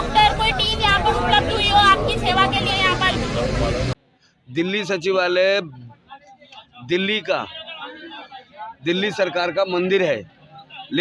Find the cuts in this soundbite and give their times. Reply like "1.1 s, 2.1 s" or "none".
3.9 s